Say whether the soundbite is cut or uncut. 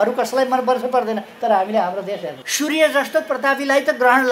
cut